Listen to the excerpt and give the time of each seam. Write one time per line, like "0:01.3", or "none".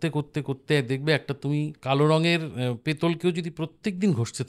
0:01.8

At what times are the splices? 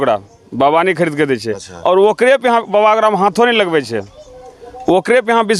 none

